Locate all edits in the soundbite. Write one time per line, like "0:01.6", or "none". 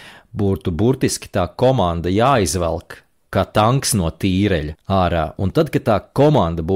0:03.2
0:04.7